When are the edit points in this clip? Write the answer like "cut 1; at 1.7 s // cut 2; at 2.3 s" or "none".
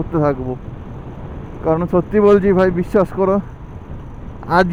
none